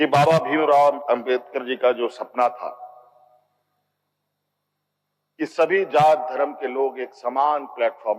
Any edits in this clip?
yes; 1 cut; at 1.0 s

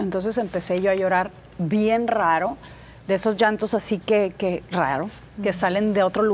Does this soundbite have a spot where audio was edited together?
no; 0 cuts

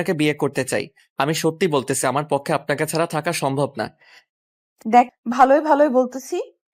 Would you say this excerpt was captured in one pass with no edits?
no; 2 cuts; at 1.0 s, 5.1 s

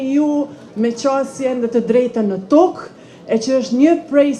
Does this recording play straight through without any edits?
yes; 0 cuts

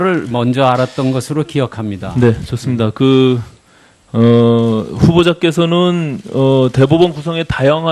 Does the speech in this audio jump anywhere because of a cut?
no; 0 cuts

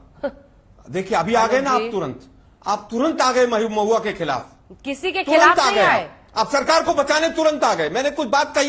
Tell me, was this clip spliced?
no; 0 cuts

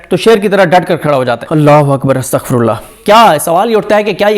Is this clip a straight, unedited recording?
no; 2 cuts; at 1.4 s, 2.9 s

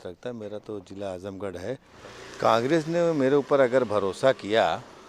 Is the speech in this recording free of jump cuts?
no; 1 cut; at 1.9 s

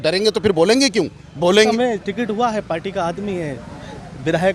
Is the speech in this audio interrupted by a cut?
yes; 1 cut; at 1.7 s

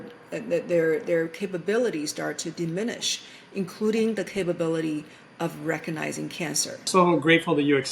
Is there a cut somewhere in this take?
yes; 1 cut; at 6.7 s

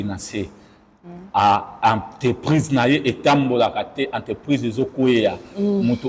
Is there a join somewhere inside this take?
no; 0 cuts

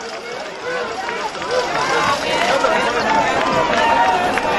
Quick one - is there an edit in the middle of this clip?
no; 0 cuts

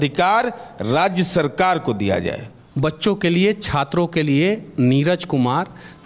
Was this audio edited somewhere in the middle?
yes; 1 cut; at 2.6 s

